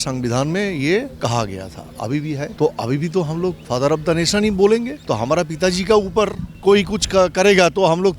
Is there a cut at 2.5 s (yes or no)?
yes